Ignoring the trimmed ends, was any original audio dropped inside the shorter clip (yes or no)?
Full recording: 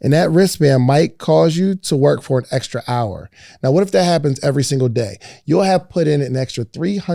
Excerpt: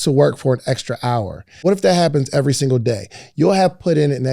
yes